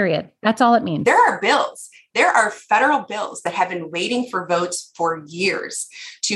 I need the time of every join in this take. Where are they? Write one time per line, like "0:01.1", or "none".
0:01.0